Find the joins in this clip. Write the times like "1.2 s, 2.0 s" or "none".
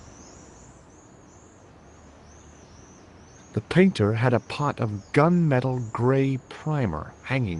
3.5 s